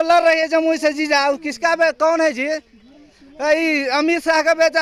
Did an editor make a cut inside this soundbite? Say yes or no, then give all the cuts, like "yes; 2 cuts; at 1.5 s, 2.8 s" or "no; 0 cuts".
no; 0 cuts